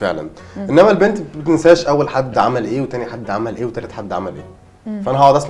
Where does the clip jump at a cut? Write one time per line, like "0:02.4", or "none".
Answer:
none